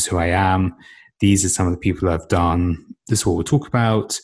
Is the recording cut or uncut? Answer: cut